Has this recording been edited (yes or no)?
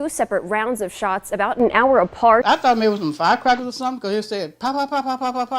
yes